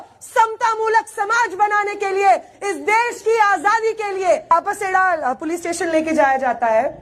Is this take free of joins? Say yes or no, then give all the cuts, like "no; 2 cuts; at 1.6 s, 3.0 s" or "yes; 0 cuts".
no; 1 cut; at 4.5 s